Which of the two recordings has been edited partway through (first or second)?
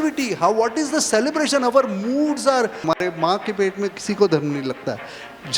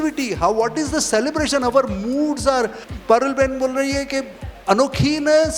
first